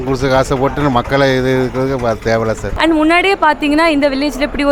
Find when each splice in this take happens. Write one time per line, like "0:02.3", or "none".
0:02.7